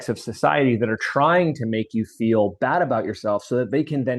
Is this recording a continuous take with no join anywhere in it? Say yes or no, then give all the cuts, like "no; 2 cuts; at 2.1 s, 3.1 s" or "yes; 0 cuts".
yes; 0 cuts